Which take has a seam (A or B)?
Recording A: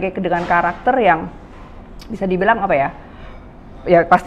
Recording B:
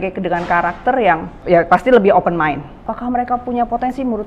B